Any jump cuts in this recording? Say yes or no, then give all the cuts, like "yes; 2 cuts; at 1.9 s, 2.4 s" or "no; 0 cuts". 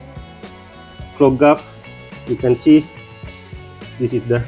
no; 0 cuts